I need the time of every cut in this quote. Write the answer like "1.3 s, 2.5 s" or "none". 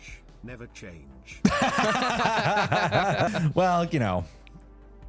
3.3 s